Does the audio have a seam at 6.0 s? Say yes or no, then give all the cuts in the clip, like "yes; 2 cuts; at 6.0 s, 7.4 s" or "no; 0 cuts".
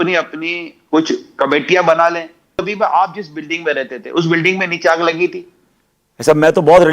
no; 1 cut; at 2.6 s